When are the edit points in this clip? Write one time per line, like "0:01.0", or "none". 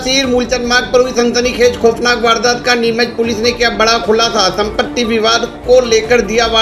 none